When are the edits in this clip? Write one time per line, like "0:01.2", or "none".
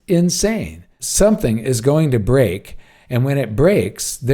0:01.0